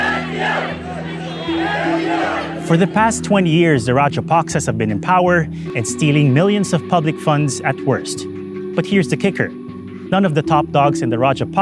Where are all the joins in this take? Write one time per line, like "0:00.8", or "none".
0:05.7